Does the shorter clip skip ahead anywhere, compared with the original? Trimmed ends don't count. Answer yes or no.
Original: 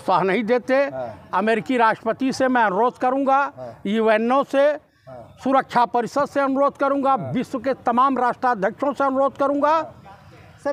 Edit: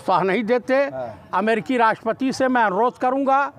no